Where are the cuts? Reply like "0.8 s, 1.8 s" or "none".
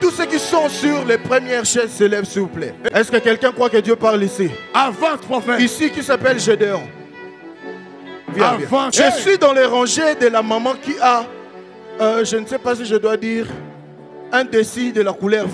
2.9 s, 8.9 s